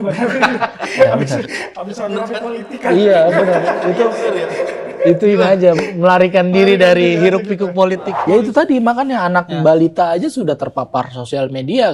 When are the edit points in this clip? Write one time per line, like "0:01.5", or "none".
0:08.1